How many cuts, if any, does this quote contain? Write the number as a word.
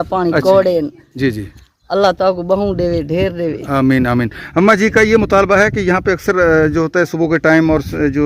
zero